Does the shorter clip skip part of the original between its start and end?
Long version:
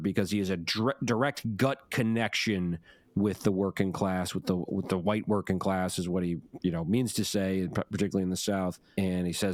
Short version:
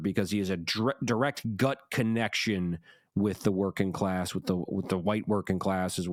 no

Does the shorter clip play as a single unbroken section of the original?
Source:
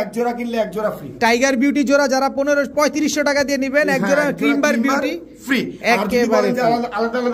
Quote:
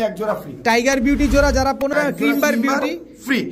no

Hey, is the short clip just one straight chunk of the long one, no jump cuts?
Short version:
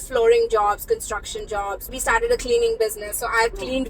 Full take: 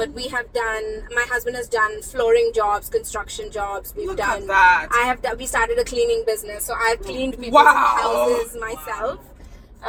no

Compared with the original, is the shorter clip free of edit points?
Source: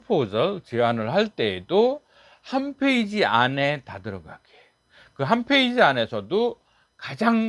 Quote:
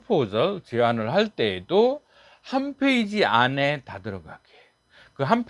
yes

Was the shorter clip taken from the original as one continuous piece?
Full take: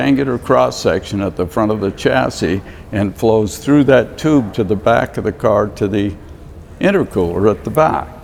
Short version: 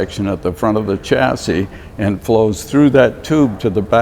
yes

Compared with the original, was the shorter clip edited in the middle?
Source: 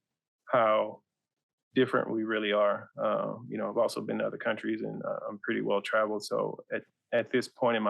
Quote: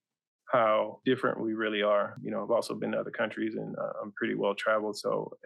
yes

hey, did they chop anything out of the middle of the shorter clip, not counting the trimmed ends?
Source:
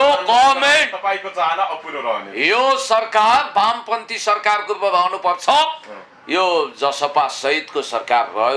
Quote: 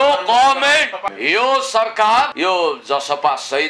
yes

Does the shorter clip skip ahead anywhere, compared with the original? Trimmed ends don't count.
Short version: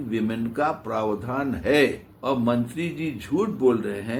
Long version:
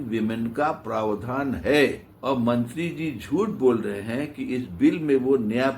no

